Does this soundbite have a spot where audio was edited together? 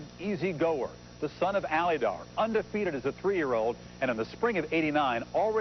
yes; 1 cut; at 1.4 s

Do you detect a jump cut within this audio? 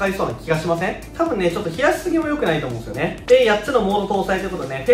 no; 0 cuts

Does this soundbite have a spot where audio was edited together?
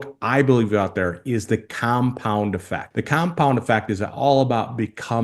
yes; 1 cut; at 2.8 s

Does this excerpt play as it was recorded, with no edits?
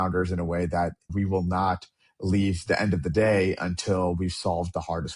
no; 1 cut; at 1.1 s

